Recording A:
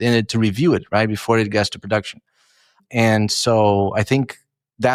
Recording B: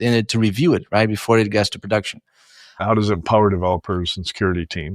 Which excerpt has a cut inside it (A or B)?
B